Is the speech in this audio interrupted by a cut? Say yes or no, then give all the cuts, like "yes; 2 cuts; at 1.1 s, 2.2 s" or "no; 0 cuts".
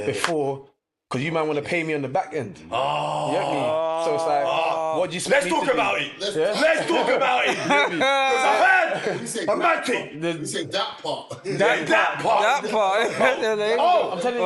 no; 0 cuts